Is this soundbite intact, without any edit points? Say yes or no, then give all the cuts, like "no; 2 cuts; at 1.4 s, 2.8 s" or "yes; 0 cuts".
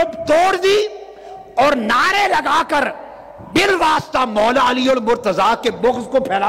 yes; 0 cuts